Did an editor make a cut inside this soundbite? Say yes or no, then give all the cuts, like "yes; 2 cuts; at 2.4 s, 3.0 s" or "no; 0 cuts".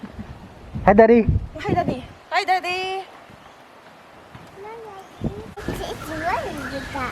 yes; 1 cut; at 5.6 s